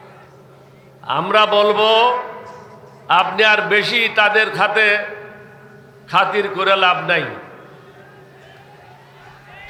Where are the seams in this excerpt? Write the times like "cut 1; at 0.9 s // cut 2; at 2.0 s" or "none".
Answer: none